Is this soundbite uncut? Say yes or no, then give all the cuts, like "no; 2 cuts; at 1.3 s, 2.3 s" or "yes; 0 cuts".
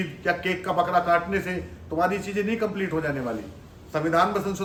yes; 0 cuts